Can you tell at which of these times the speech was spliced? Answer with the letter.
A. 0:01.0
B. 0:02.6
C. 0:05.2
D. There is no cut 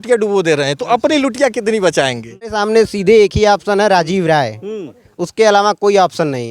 B